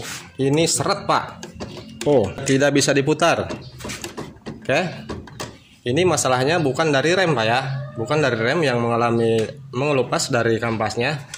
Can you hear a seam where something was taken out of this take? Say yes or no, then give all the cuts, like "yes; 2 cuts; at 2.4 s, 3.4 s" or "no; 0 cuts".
yes; 1 cut; at 2.4 s